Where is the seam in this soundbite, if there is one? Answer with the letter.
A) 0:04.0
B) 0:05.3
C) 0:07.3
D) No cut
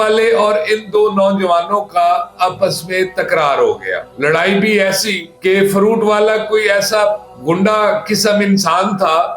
A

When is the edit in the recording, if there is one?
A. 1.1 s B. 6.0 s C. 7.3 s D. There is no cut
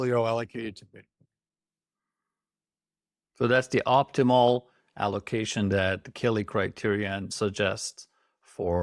C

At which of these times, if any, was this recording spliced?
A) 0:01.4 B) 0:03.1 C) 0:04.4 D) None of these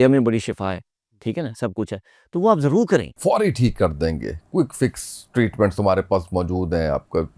B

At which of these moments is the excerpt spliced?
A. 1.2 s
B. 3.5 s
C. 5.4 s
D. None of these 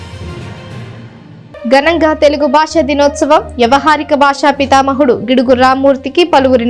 A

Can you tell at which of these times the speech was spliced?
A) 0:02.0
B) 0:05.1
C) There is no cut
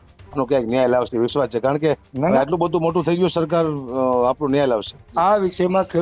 B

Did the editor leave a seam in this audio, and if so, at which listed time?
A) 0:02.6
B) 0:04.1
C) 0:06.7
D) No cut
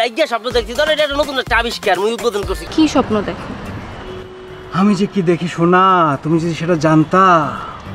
A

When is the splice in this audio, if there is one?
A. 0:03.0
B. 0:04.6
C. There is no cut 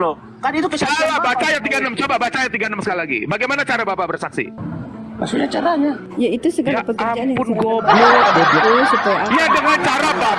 B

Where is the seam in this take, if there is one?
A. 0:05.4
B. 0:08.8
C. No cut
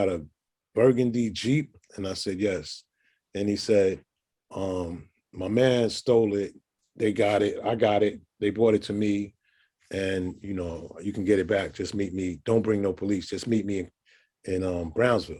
C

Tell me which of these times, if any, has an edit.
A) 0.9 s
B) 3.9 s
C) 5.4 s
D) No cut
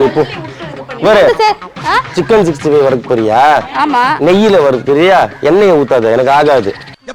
D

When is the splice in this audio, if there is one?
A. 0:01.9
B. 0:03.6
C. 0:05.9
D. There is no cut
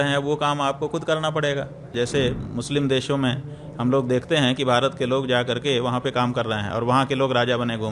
A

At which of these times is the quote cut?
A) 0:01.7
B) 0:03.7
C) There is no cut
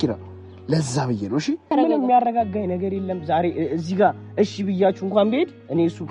A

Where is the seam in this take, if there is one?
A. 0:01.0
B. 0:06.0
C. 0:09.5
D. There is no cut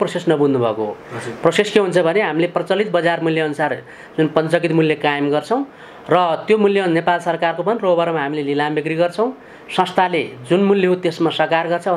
D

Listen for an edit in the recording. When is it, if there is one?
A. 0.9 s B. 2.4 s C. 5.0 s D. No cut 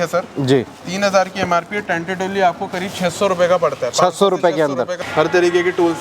C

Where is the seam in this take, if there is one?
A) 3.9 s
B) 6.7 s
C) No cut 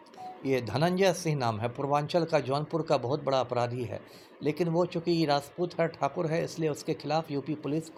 C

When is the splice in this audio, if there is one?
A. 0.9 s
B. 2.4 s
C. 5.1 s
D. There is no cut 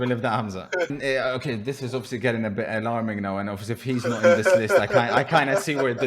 A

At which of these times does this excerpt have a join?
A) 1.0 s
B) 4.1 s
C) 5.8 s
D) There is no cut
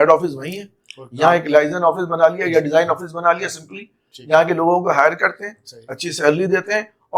D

